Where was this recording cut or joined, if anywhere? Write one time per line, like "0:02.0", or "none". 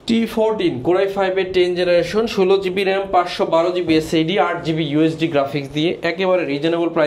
none